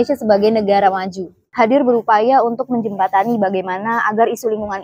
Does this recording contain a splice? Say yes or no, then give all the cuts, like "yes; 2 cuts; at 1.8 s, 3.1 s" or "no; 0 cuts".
yes; 1 cut; at 1.4 s